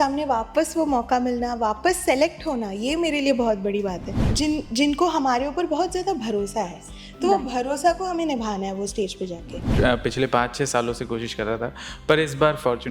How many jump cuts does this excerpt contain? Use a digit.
2